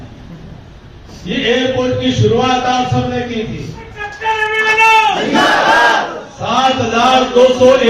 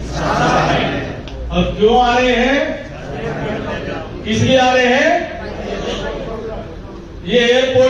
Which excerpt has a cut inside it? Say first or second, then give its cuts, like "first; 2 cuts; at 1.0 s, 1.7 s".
first; 1 cut; at 4.1 s